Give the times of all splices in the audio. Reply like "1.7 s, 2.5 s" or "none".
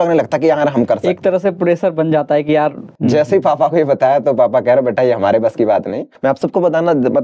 2.9 s, 6.0 s